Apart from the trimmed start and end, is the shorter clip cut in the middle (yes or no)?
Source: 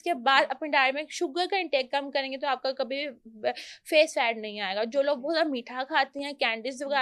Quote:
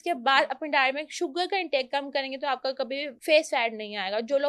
yes